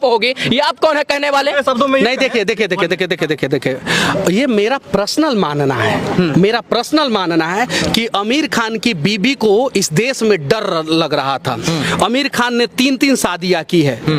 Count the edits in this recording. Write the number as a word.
zero